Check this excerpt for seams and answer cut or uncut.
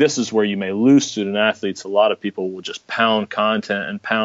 uncut